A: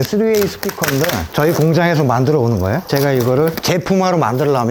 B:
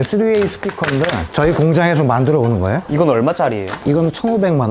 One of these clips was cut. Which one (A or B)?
B